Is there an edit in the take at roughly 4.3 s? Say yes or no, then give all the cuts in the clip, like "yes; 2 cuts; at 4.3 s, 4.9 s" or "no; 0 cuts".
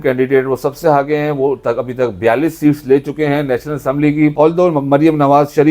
yes; 1 cut; at 4.3 s